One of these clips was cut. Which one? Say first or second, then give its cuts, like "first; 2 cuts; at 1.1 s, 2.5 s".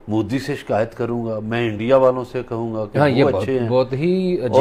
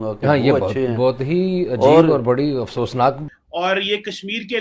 second; 1 cut; at 3.2 s